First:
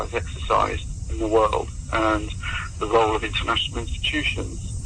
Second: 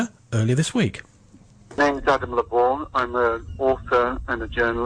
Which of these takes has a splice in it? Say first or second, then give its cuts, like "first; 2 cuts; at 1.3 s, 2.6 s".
second; 1 cut; at 1.4 s